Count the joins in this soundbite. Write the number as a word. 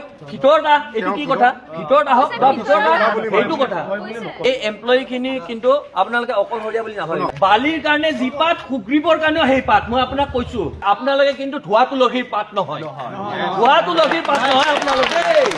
two